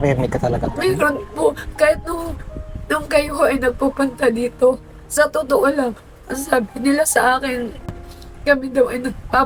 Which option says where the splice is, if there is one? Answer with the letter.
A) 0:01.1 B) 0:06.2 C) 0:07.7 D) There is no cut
D